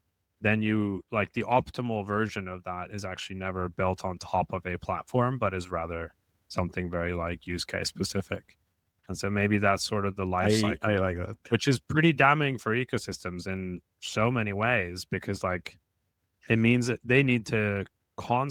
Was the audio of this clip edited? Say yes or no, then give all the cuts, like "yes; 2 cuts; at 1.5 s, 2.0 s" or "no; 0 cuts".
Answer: no; 0 cuts